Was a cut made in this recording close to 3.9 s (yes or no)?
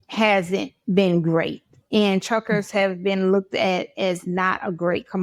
no